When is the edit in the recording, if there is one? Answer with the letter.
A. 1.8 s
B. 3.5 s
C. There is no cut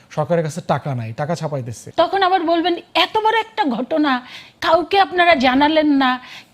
A